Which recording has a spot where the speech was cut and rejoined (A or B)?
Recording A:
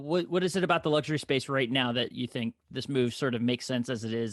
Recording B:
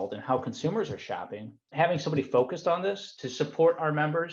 B